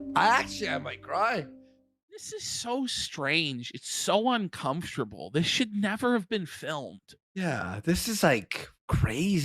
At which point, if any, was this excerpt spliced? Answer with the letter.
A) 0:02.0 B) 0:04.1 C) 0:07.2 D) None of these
A